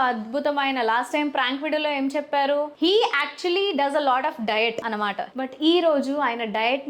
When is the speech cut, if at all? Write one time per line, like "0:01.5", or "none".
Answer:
0:02.8
0:05.3